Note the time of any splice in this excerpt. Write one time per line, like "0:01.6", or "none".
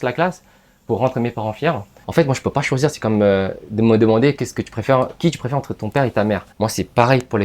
0:01.9
0:06.5

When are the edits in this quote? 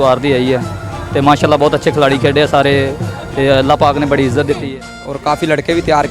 0:04.7

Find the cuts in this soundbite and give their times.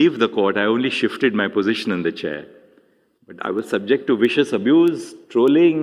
none

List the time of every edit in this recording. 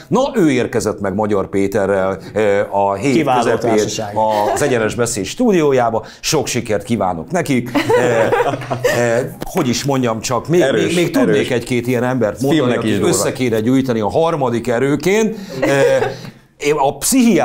none

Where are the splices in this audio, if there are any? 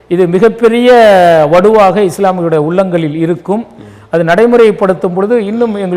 none

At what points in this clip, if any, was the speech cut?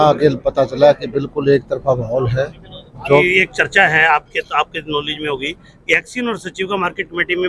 0:03.2

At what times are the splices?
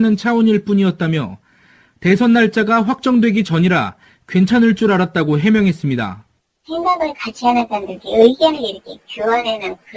0:07.7

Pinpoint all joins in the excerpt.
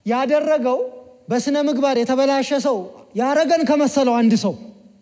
none

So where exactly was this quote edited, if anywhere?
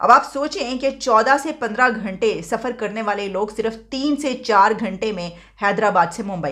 none

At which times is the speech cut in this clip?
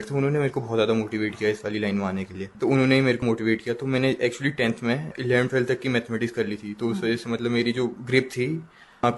0:02.4
0:03.2
0:05.1
0:08.0

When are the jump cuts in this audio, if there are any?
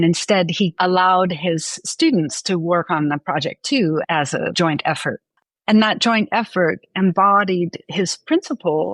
none

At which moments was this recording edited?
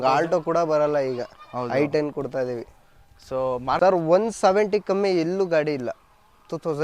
0:03.8

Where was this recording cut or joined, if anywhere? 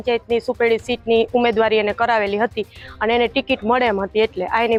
none

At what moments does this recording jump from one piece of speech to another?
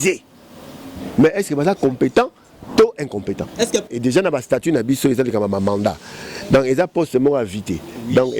0:03.9

